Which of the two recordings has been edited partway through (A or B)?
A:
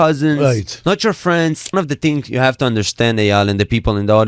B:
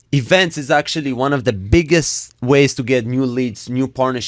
A